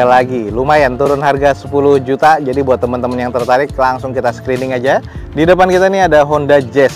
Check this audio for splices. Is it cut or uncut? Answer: uncut